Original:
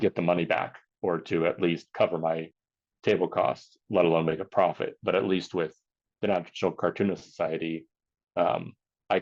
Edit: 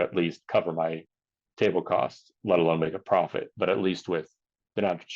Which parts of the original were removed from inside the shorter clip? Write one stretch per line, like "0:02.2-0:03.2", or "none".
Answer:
none